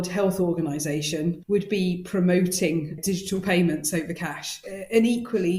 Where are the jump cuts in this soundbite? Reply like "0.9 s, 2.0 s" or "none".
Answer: 1.4 s